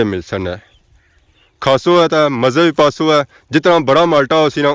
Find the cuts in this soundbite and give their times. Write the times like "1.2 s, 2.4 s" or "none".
none